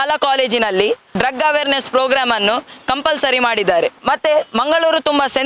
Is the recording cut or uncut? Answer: uncut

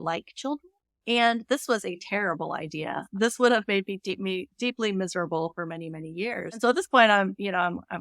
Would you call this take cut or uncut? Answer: cut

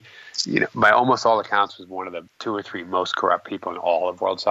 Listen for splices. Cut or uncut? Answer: cut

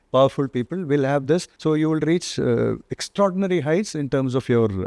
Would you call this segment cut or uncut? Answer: cut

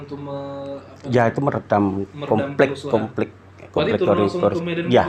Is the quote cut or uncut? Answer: uncut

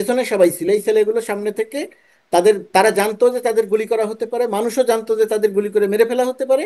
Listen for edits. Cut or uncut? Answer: uncut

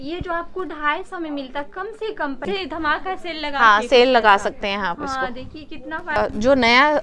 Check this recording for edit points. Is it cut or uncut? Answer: cut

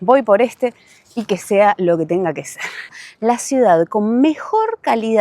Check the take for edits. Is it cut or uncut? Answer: cut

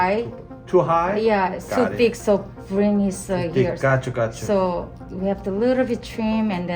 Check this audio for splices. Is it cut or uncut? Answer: uncut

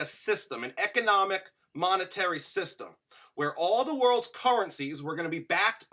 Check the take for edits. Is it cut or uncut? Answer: uncut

